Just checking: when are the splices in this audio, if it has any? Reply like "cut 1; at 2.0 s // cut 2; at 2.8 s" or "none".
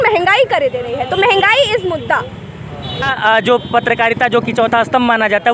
cut 1; at 3.1 s